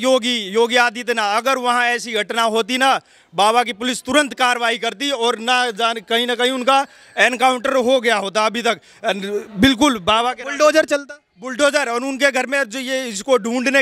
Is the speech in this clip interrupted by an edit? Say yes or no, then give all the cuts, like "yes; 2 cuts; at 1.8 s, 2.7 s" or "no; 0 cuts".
no; 0 cuts